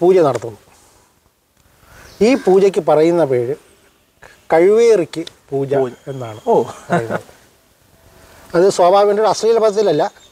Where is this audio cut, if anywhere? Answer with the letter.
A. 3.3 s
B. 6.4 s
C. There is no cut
C